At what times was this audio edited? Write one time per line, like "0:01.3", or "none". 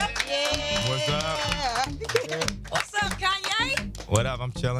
0:01.7